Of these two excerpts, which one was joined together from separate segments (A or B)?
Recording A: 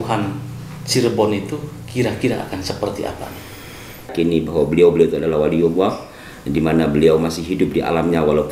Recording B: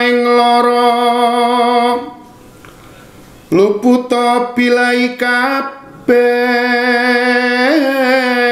A